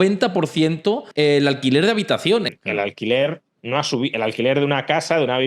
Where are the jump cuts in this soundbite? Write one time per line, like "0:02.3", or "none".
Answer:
0:02.5